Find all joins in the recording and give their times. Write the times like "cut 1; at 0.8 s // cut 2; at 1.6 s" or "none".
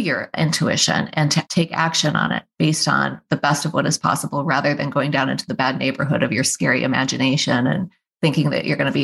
cut 1; at 1.5 s // cut 2; at 8.0 s